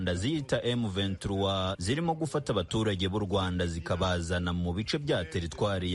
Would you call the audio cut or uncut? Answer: uncut